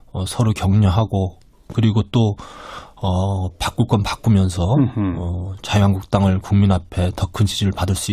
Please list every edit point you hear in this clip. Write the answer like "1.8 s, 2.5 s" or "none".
none